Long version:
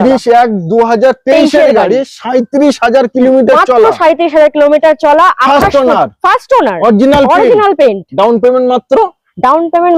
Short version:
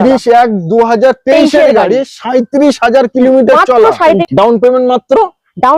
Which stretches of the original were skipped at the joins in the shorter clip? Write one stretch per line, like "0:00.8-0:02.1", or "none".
0:04.2-0:08.0

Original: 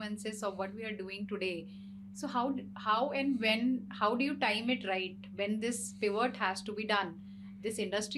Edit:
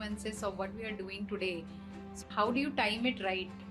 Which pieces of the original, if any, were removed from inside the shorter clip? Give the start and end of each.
0:02.2-0:03.9

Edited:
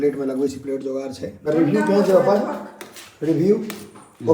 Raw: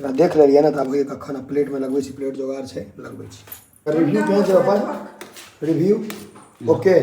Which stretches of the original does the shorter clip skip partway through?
0:02.8-0:03.7

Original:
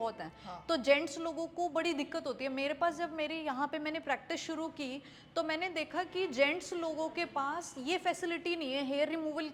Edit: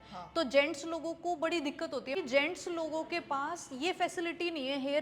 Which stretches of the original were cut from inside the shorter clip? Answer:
0:02.5-0:06.2

